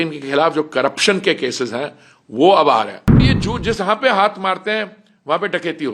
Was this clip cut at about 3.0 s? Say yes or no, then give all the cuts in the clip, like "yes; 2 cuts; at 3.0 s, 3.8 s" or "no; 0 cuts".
yes; 1 cut; at 3.0 s